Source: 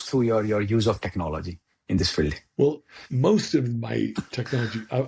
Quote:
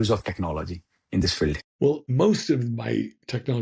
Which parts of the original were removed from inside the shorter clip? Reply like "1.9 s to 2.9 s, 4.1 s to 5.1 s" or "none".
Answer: 2.5 s to 2.8 s